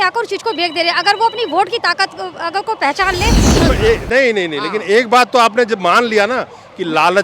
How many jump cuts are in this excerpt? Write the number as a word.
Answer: one